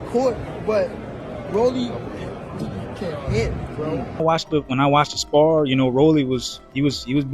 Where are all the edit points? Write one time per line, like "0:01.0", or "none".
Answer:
0:04.2